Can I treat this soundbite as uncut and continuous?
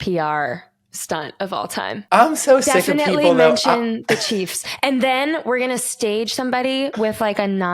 no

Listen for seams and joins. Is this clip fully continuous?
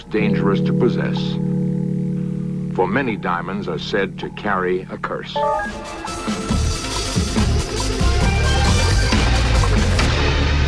no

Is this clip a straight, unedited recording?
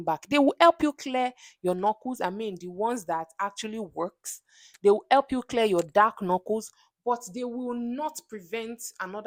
yes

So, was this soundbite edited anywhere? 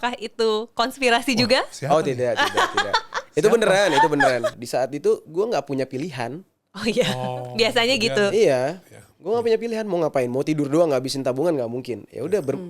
yes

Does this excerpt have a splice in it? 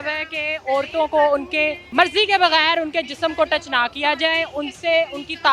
yes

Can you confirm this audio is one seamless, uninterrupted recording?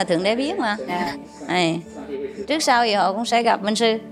yes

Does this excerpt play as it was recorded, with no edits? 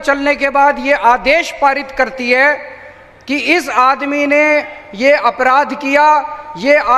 yes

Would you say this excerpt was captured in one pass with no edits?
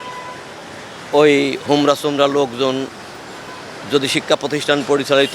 yes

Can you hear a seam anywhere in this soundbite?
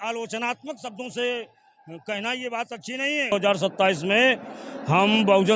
yes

